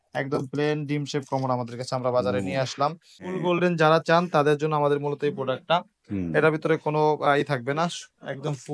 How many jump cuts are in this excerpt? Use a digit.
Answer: 1